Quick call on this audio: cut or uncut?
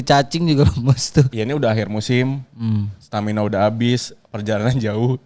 cut